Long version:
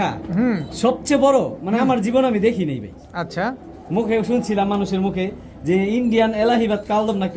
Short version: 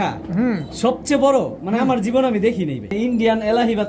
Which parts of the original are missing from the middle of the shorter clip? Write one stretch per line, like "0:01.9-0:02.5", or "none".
0:02.9-0:05.9